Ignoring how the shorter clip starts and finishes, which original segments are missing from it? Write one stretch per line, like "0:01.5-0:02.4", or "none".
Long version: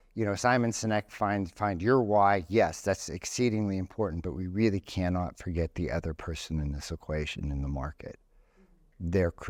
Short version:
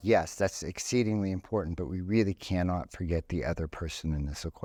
none